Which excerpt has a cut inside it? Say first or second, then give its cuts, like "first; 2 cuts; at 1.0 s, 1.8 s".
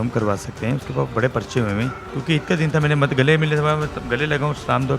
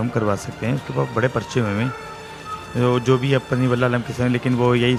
first; 1 cut; at 2.1 s